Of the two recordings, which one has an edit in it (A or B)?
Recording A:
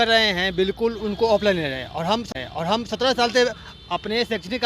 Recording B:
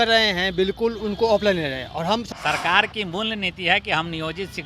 B